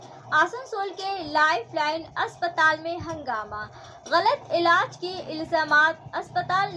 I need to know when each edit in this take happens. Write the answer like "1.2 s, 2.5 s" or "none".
none